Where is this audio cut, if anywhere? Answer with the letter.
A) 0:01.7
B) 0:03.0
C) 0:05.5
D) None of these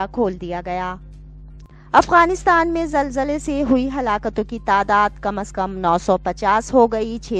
A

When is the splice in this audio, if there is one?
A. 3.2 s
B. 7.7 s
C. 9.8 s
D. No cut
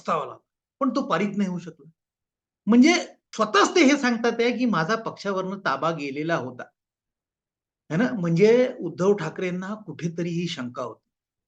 A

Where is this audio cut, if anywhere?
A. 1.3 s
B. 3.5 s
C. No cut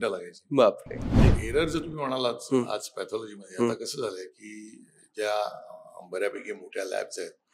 A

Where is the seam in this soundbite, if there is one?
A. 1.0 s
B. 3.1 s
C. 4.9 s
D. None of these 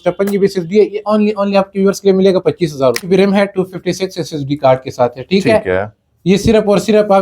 B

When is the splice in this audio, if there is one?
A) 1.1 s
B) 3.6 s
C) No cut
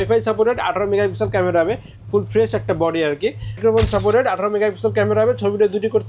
B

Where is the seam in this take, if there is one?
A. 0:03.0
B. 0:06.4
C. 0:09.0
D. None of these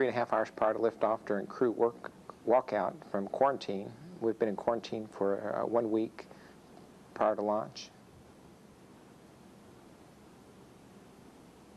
C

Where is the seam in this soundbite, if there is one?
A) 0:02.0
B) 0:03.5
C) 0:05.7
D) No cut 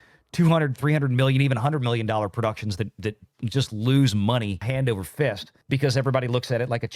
D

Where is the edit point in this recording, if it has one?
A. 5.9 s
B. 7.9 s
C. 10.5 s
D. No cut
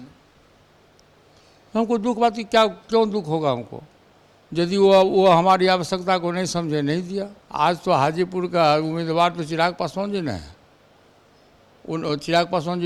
D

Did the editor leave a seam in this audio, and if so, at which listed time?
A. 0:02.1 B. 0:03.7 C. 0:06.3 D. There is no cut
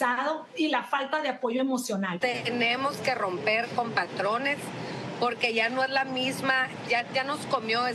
A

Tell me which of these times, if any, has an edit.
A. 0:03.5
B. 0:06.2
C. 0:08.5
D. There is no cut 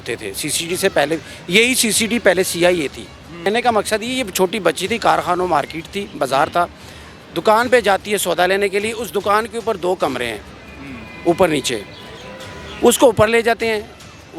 A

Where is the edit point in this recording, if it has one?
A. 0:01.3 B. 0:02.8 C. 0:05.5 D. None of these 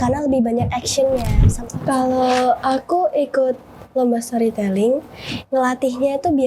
A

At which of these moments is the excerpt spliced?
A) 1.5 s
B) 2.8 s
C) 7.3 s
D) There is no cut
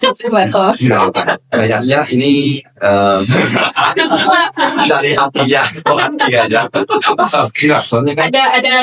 D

